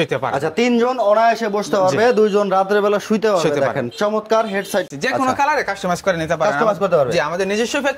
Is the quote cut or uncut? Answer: cut